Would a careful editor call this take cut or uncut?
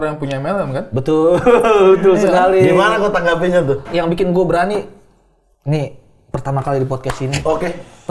cut